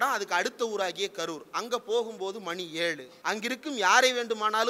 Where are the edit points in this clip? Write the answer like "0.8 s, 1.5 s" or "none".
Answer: 3.1 s